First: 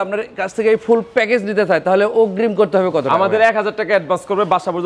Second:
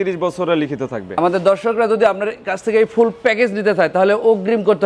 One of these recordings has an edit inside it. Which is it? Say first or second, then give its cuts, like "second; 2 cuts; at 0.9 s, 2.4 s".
second; 1 cut; at 1.2 s